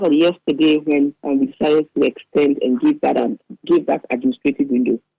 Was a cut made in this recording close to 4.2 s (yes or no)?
no